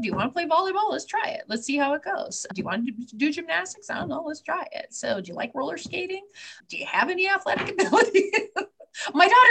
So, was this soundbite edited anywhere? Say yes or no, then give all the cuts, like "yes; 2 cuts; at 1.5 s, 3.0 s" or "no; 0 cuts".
no; 0 cuts